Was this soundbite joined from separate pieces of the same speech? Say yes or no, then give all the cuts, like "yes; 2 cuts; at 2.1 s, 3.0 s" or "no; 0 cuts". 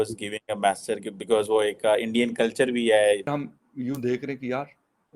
yes; 1 cut; at 3.3 s